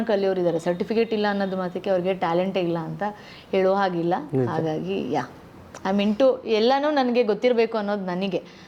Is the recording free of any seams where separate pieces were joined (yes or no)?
yes